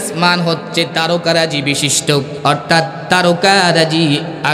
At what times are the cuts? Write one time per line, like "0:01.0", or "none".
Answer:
0:02.3